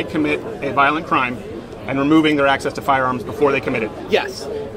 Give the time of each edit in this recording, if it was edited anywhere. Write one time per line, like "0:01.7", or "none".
none